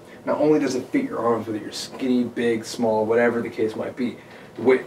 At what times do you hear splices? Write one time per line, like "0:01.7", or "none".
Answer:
none